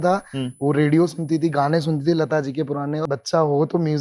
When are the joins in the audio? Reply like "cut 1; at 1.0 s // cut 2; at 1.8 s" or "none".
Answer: cut 1; at 3.0 s